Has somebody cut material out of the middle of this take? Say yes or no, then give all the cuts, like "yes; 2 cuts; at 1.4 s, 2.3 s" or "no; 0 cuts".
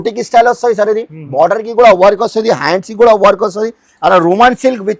no; 0 cuts